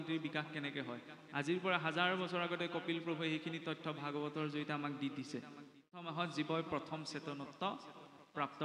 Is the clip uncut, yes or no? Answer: no